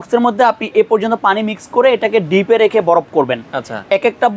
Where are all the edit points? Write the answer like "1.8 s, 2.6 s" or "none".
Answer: none